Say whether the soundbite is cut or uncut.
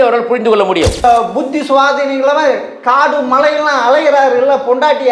cut